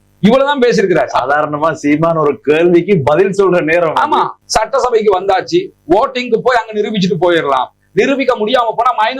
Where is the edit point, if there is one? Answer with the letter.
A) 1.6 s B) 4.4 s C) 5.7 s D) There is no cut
B